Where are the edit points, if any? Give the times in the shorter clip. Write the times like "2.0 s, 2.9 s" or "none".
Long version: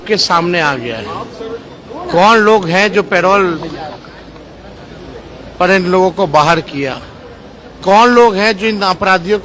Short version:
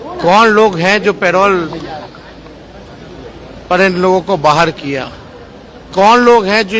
none